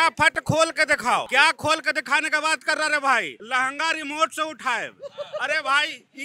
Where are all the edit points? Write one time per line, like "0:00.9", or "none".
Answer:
0:01.3